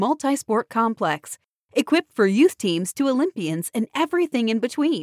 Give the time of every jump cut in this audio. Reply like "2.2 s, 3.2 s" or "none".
none